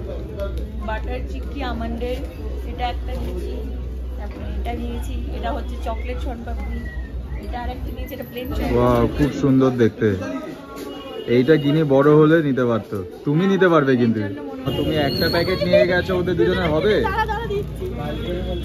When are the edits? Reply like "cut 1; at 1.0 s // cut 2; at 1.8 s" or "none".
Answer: cut 1; at 8.6 s // cut 2; at 14.7 s